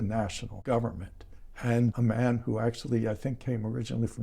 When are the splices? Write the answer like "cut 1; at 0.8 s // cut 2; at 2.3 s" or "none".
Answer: cut 1; at 1.8 s